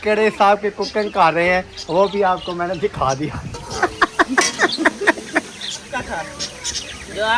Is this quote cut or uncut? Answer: cut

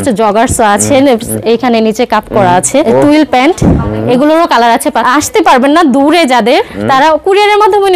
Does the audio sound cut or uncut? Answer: cut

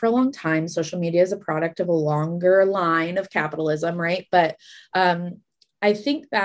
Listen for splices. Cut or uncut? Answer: uncut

